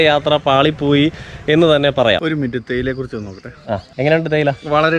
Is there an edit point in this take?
yes; 2 cuts; at 2.2 s, 3.9 s

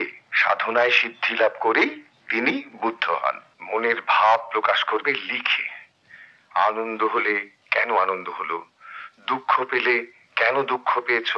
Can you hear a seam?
yes; 1 cut; at 3.5 s

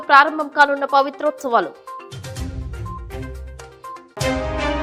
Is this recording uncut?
yes; 0 cuts

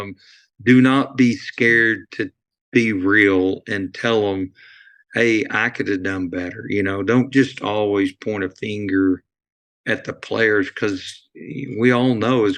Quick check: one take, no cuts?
yes; 0 cuts

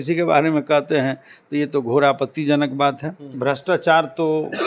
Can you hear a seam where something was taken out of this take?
yes; 1 cut; at 3.3 s

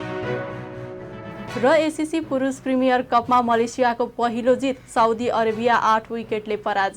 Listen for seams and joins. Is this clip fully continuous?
no; 1 cut; at 1.0 s

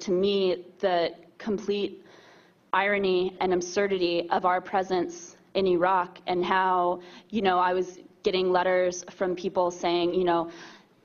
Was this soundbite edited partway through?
yes; 1 cut; at 9.1 s

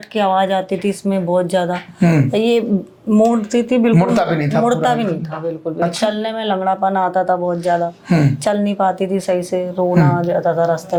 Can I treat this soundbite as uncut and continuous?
yes; 0 cuts

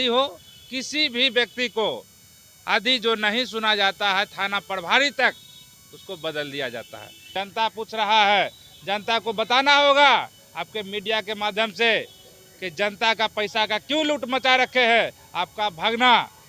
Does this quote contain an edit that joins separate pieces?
yes; 1 cut; at 7.3 s

